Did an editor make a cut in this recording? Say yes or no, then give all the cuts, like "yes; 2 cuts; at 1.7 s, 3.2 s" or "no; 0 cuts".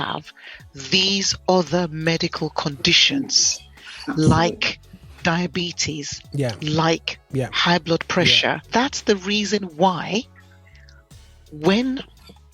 yes; 1 cut; at 8.6 s